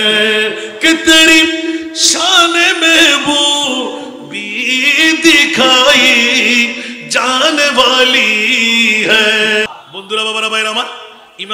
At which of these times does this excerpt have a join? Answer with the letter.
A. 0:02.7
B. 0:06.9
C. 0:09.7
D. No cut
C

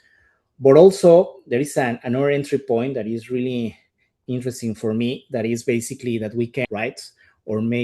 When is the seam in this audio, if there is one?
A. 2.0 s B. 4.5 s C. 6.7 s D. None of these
C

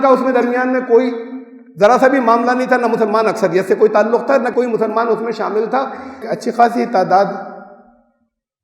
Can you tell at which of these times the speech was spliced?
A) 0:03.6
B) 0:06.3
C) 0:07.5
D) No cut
B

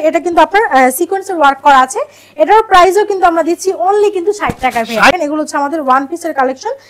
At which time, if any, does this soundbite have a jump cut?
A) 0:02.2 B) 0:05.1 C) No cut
B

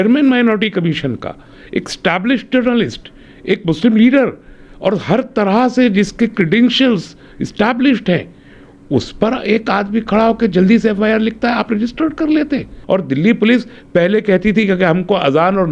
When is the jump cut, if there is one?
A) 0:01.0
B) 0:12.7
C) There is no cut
B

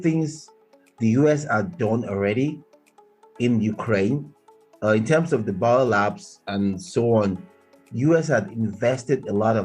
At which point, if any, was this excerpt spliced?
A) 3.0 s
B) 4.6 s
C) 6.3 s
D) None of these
D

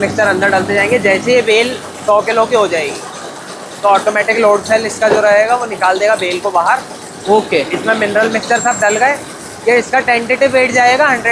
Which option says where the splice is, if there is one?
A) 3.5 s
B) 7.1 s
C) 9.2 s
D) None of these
D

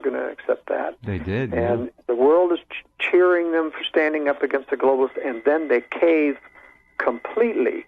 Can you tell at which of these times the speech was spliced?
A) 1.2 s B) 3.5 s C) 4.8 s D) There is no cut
C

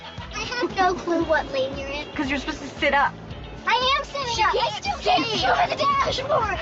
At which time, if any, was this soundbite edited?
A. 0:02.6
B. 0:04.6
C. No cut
C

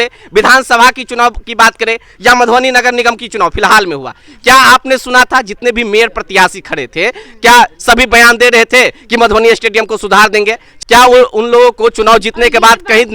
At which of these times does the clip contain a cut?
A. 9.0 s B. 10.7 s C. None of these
B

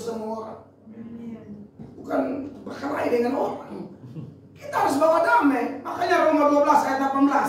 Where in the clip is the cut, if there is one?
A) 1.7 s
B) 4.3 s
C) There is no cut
A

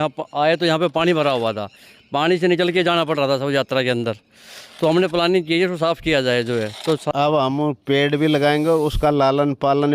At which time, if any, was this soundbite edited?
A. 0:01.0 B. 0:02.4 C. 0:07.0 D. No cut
C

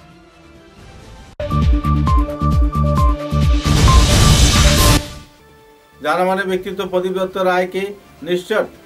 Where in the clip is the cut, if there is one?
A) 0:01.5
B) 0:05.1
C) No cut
B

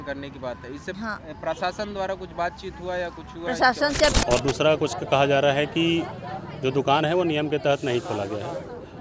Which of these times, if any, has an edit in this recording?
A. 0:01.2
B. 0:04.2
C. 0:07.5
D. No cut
B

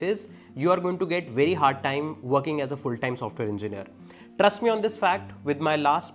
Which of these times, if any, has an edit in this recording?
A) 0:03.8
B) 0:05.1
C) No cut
C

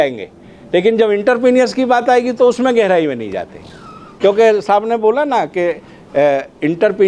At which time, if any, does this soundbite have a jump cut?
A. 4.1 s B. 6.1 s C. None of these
C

